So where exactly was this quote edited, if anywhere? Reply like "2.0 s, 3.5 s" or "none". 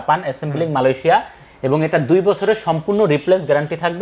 none